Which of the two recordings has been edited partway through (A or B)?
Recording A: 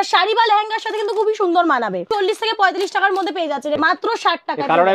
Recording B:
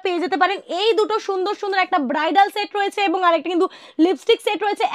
A